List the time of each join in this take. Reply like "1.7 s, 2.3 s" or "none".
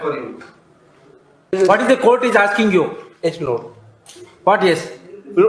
1.5 s